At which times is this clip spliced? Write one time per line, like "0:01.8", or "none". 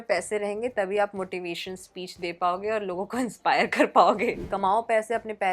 0:04.4